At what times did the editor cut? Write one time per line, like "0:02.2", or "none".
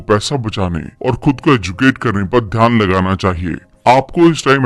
none